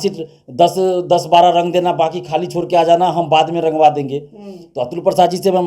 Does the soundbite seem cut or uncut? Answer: uncut